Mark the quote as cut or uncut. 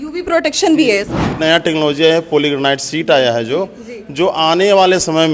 cut